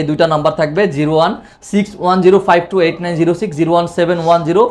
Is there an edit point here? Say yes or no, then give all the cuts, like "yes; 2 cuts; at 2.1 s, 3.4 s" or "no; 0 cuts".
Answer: no; 0 cuts